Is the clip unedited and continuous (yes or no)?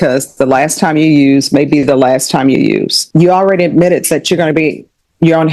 no